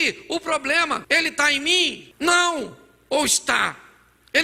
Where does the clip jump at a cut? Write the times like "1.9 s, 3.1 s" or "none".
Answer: 1.0 s, 2.0 s